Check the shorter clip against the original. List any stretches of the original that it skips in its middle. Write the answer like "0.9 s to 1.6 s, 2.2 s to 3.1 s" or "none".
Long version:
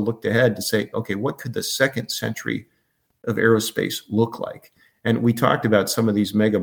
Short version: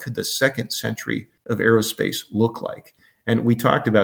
2.7 s to 3.1 s